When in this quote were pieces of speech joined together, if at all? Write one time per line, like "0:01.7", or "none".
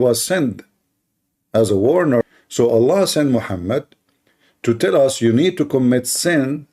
0:02.2